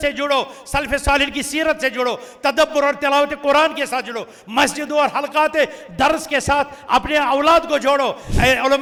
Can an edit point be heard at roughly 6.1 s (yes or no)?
no